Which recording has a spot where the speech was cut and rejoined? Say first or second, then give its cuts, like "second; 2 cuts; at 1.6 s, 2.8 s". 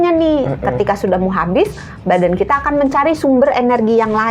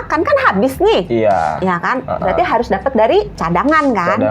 second; 1 cut; at 3.4 s